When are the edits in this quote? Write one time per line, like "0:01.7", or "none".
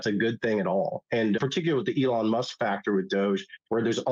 0:01.4